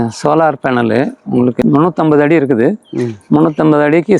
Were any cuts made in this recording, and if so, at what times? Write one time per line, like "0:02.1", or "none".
0:01.6